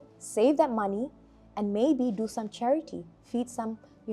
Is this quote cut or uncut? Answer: uncut